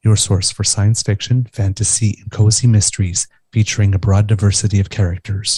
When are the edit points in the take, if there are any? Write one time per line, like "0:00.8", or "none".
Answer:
none